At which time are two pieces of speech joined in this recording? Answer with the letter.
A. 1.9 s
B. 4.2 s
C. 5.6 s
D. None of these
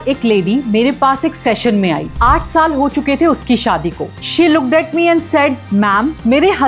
B